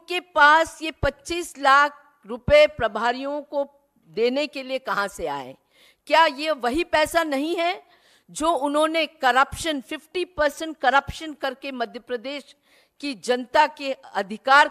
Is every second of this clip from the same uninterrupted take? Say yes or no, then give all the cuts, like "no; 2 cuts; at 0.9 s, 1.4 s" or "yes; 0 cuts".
yes; 0 cuts